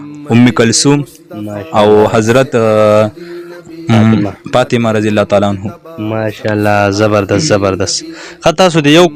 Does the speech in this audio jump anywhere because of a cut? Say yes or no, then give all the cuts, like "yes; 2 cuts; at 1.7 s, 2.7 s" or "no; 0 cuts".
no; 0 cuts